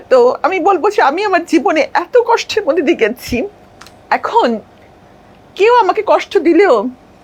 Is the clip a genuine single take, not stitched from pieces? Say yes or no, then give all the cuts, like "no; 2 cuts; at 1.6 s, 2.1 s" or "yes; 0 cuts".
yes; 0 cuts